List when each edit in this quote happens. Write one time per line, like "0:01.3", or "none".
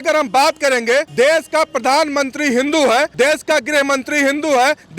0:01.1
0:03.1